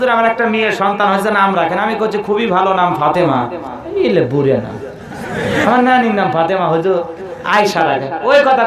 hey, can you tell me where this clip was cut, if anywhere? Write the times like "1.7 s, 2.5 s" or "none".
none